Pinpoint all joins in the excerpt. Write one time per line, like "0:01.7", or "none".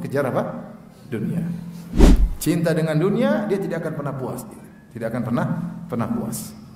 0:01.9